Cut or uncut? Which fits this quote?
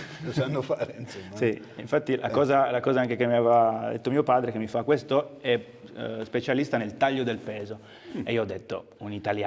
uncut